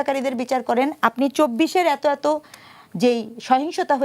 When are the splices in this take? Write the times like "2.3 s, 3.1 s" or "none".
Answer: none